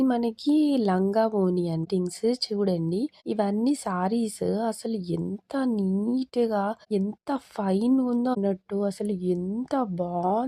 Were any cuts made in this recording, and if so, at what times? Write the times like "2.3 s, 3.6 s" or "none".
1.9 s, 8.4 s